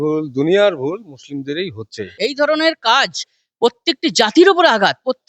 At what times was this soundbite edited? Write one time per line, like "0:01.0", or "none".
0:02.1